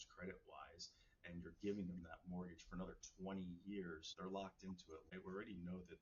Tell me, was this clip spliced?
yes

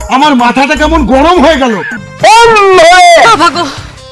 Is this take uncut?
no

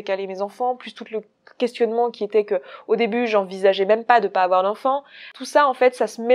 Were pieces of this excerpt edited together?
yes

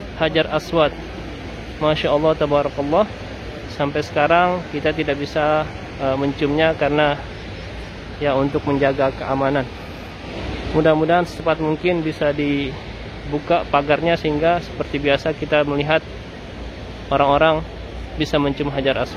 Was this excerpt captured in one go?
yes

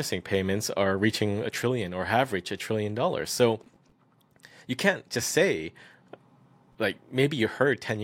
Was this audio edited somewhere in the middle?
no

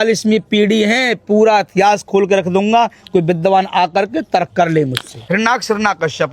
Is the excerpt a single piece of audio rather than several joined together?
no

